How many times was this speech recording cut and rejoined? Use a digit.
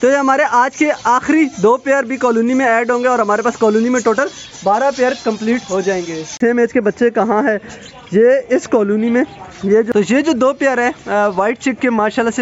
2